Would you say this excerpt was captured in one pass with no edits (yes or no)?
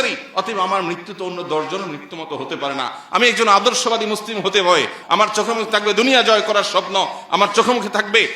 no